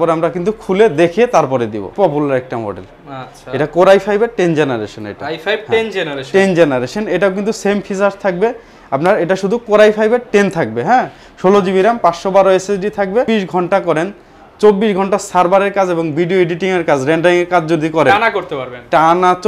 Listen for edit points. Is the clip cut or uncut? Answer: cut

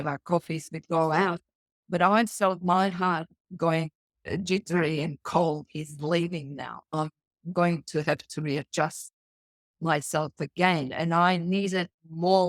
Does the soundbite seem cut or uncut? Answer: uncut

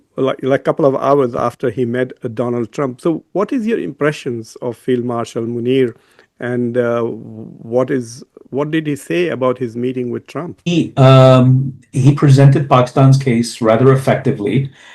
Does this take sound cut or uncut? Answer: cut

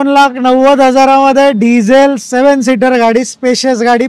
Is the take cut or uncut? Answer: uncut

